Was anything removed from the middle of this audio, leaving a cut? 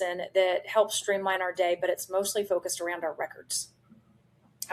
no; 0 cuts

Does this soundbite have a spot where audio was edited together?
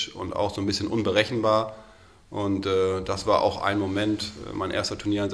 no; 0 cuts

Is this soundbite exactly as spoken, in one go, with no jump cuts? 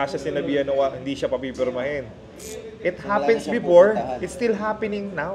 yes; 0 cuts

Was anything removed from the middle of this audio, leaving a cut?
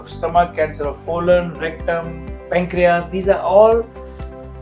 no; 0 cuts

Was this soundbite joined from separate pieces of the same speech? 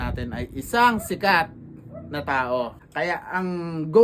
yes; 1 cut; at 2.8 s

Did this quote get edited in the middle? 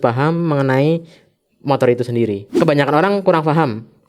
yes; 1 cut; at 2.5 s

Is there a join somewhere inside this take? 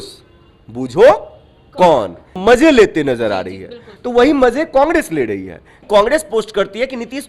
yes; 2 cuts; at 2.3 s, 5.8 s

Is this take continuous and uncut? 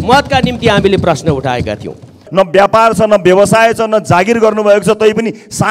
no; 1 cut; at 2.2 s

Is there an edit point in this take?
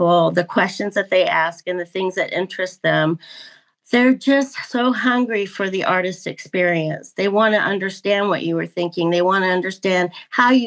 no; 0 cuts

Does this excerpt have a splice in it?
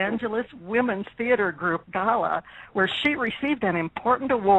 yes; 1 cut; at 2.2 s

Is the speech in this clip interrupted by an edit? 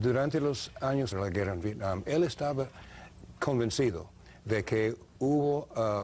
no; 0 cuts

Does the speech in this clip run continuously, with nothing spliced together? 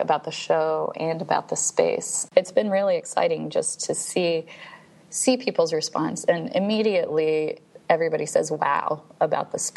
no; 1 cut; at 2.1 s

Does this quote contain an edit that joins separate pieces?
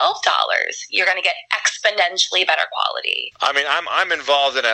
yes; 1 cut; at 3.2 s

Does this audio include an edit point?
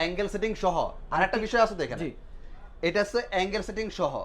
no; 0 cuts

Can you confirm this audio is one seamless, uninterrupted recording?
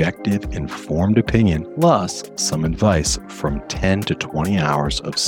no; 1 cut; at 1.7 s

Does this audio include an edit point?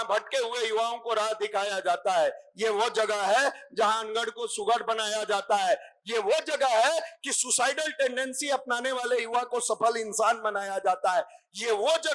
no; 0 cuts

